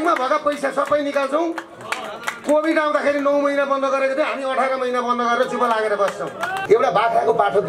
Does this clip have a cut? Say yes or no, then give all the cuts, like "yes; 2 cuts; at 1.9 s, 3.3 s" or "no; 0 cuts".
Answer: yes; 1 cut; at 6.5 s